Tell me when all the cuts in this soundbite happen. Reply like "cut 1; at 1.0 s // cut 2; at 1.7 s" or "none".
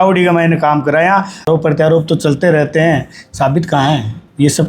cut 1; at 1.5 s